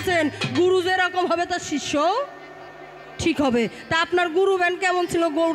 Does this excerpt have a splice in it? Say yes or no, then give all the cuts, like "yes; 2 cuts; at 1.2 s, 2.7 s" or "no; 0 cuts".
no; 0 cuts